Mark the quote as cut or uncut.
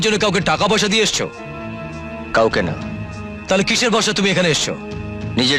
uncut